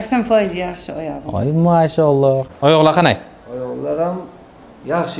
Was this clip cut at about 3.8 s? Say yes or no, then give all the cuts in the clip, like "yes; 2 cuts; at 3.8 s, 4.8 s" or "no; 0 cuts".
no; 1 cut; at 2.5 s